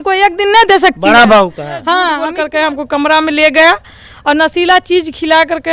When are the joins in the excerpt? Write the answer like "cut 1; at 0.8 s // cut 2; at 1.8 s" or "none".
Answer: cut 1; at 2.2 s